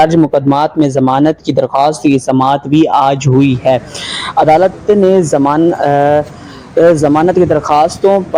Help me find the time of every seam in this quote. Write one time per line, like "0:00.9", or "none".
none

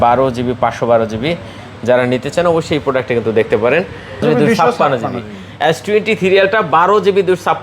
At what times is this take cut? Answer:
0:04.2

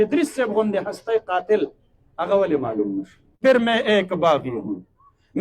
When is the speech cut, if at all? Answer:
0:03.4

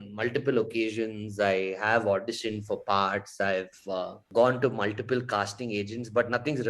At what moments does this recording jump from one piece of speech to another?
none

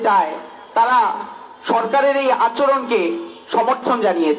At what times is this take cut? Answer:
none

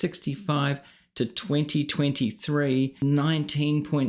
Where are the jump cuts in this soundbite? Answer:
0:02.9

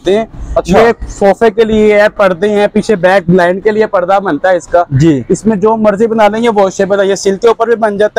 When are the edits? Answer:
none

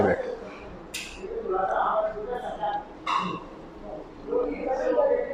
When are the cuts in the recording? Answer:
none

